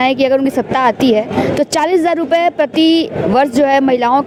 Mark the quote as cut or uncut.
uncut